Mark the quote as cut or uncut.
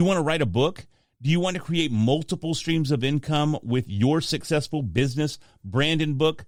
uncut